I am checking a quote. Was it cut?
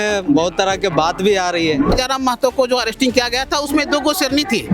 yes; 1 cut; at 1.9 s

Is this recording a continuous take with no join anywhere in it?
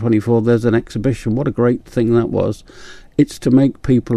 yes; 0 cuts

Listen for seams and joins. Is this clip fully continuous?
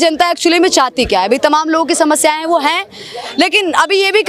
yes; 0 cuts

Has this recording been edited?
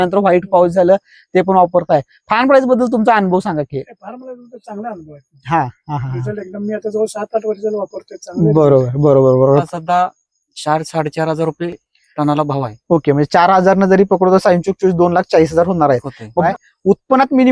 yes; 2 cuts; at 9.7 s, 16.5 s

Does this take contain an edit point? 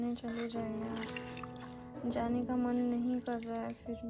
no; 0 cuts

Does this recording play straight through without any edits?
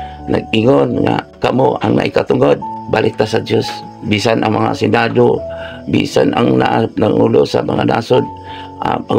no; 2 cuts; at 1.3 s, 2.7 s

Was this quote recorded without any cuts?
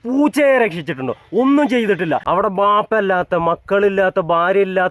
no; 1 cut; at 2.2 s

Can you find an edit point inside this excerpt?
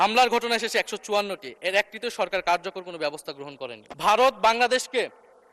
yes; 1 cut; at 3.8 s

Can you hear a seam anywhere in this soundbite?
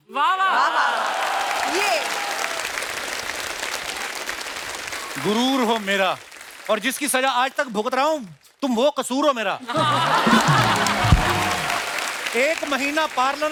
no; 0 cuts

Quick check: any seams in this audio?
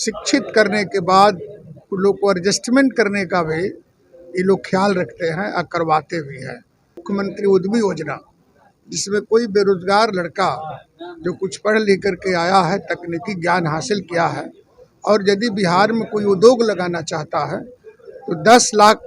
yes; 1 cut; at 7.0 s

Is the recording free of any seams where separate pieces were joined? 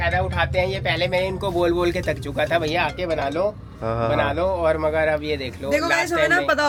yes; 0 cuts

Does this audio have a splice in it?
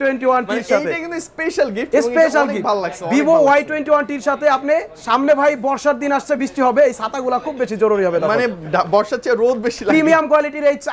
no; 0 cuts

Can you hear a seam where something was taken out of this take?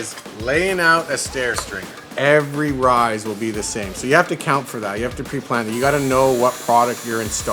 yes; 1 cut; at 2.0 s

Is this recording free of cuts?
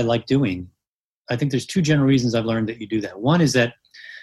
no; 1 cut; at 1.3 s

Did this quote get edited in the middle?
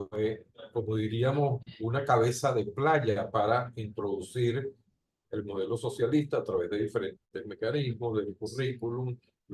no; 0 cuts

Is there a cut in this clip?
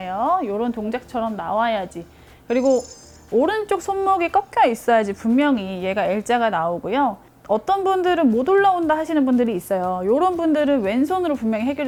no; 0 cuts

